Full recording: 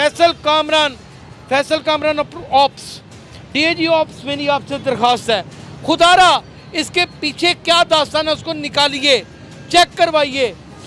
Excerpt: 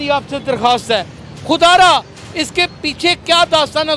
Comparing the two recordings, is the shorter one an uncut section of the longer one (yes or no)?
yes